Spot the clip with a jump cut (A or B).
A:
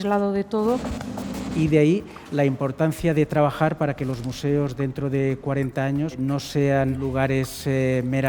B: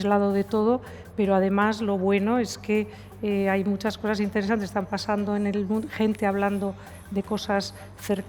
A